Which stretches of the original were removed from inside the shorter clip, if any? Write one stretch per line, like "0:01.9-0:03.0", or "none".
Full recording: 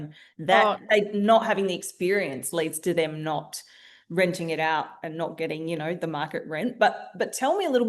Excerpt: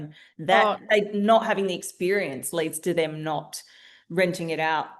none